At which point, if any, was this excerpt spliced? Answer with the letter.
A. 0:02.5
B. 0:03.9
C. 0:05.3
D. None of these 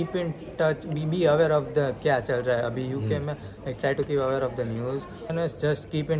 C